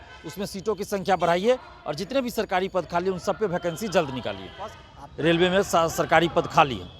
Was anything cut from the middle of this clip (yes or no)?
yes